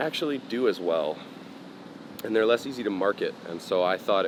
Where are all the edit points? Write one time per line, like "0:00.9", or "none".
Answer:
none

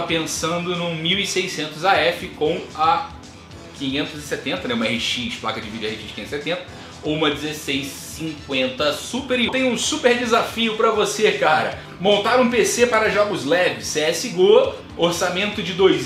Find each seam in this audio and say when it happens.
0:09.5
0:11.8

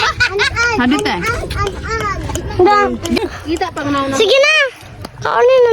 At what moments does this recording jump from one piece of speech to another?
0:03.2

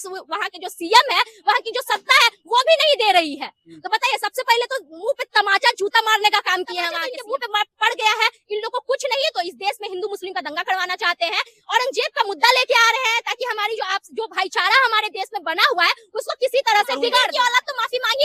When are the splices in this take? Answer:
0:07.1
0:17.2

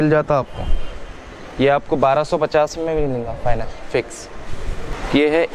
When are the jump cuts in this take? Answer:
none

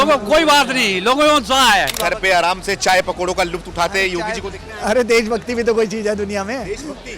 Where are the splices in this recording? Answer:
0:01.9

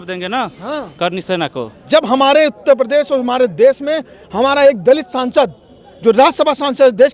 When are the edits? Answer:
0:01.7

